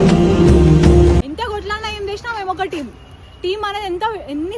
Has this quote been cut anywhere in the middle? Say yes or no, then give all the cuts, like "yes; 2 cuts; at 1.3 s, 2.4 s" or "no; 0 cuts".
no; 0 cuts